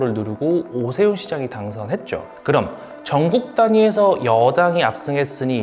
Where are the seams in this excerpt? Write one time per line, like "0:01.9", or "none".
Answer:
none